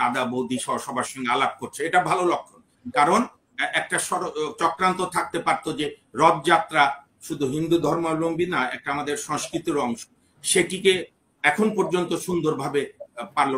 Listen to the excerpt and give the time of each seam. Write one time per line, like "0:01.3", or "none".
none